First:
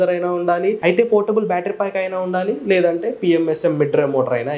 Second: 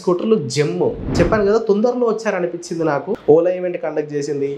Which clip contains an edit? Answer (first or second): second